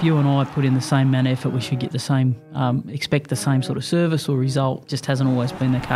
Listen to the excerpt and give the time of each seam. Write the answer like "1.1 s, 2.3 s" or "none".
4.9 s

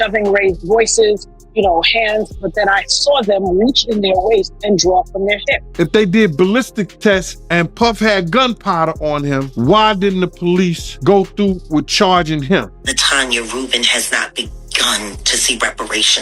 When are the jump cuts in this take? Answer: 5.6 s, 7.4 s, 9.5 s, 10.9 s, 12.8 s

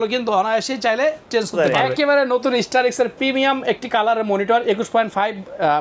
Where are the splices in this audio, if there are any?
1.5 s

